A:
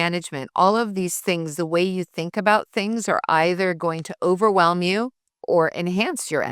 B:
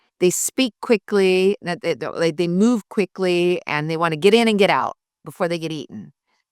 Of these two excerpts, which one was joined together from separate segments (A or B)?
A